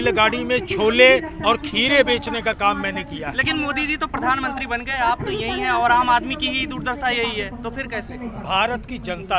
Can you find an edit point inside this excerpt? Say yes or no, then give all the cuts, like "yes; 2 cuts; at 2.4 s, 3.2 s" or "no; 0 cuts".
no; 0 cuts